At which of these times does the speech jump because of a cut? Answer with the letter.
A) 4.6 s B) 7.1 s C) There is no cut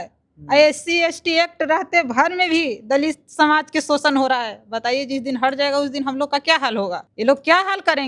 B